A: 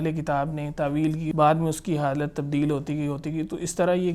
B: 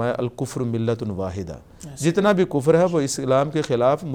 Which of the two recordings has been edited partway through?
A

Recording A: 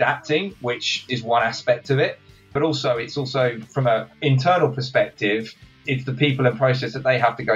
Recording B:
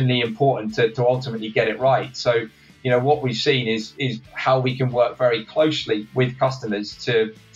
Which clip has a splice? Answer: A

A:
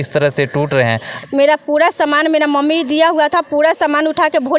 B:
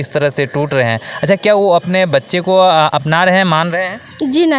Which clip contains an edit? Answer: A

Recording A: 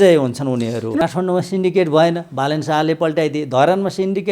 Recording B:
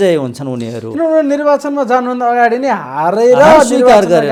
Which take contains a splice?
A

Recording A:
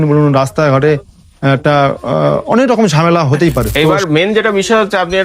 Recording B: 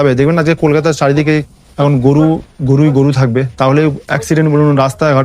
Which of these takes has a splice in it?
A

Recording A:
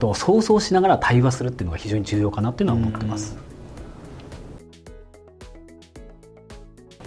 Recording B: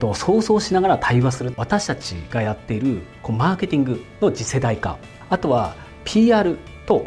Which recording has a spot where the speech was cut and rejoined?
B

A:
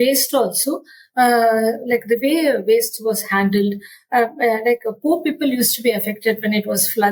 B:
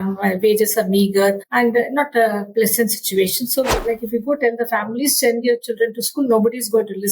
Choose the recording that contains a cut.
B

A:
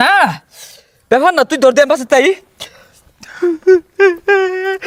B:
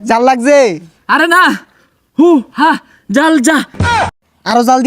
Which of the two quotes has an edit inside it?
B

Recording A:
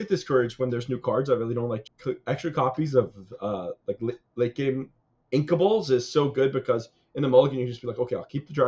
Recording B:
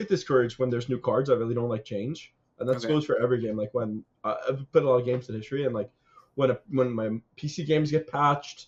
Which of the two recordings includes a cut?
A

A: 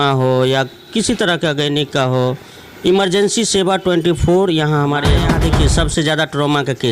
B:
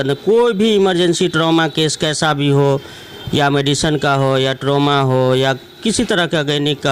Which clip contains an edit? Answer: A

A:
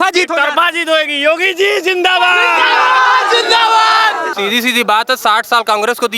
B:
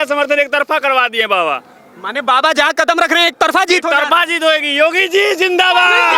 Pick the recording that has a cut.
A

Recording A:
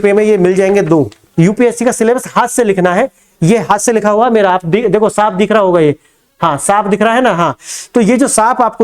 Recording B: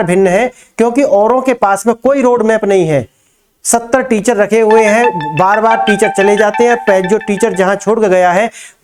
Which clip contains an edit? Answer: A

